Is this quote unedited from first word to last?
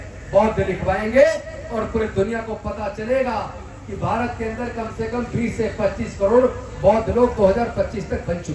yes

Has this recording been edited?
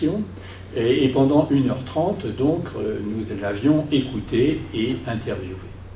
yes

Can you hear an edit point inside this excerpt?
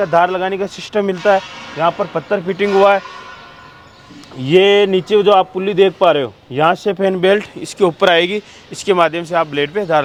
no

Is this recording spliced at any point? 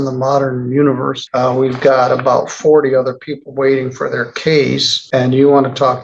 yes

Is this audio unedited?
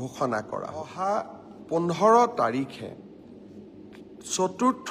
no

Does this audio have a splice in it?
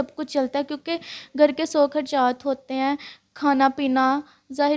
no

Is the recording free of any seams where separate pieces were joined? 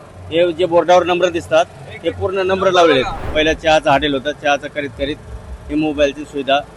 no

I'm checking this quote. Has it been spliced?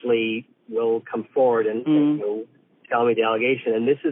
no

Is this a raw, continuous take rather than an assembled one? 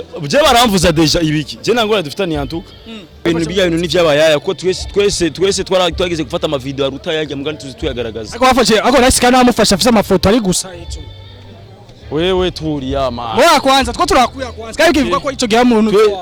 no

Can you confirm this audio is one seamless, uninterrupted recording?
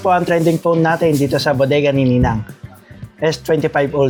yes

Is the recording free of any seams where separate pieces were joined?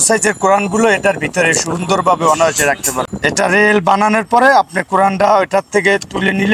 no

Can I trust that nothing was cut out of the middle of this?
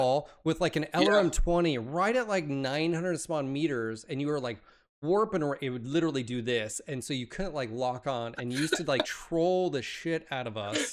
yes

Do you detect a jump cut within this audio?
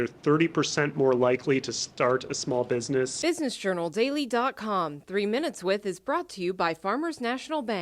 yes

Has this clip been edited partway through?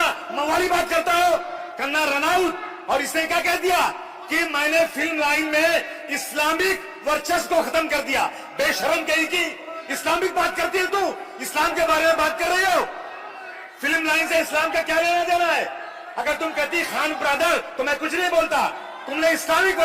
yes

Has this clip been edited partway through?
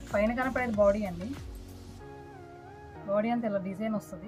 yes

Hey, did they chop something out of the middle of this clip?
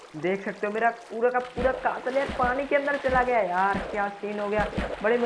no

